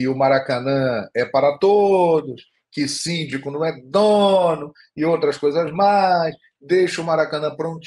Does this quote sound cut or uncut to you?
uncut